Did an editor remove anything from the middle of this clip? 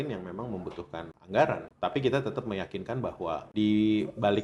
yes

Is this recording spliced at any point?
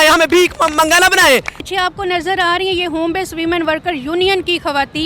yes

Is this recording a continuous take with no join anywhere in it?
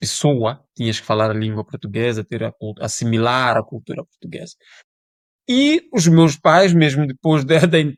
yes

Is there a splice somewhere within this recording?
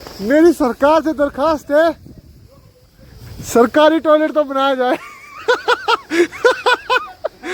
no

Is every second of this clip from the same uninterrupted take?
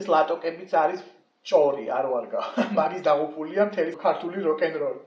no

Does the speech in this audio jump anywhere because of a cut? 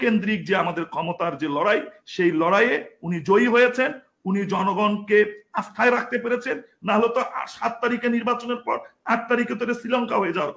no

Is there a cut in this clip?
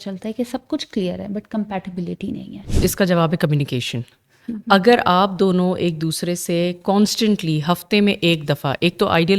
yes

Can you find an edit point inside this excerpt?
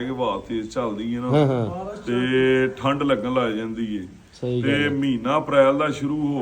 no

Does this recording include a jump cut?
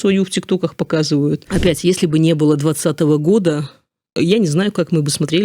yes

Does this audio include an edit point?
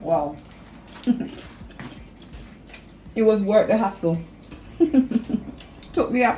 no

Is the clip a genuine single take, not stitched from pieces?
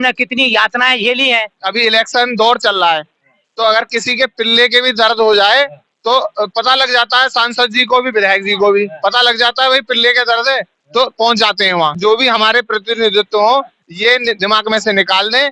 no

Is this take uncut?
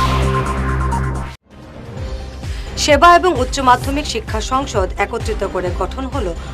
no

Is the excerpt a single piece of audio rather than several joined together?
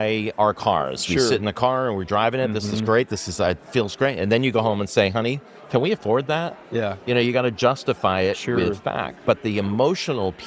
yes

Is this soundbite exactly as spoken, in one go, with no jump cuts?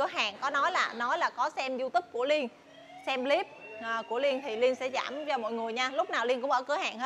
yes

